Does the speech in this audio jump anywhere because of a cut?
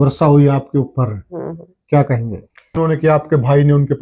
yes; 1 cut; at 2.8 s

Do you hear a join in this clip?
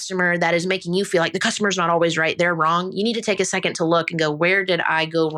no; 0 cuts

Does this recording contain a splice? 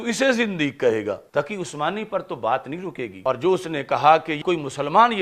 yes; 3 cuts; at 1.2 s, 3.1 s, 4.4 s

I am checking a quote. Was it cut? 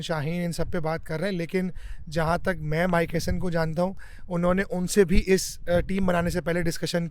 no; 0 cuts

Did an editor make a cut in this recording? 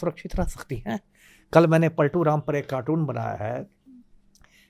no; 0 cuts

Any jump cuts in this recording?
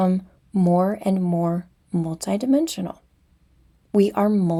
no; 0 cuts

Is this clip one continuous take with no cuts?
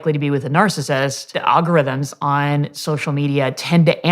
no; 1 cut; at 1.3 s

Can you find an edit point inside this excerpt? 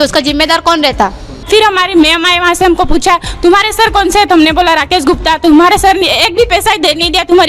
yes; 1 cut; at 1.4 s

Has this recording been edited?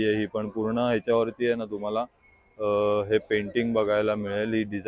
no; 0 cuts

